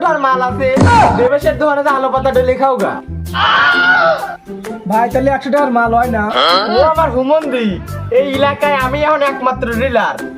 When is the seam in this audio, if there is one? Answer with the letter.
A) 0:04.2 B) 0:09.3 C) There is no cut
C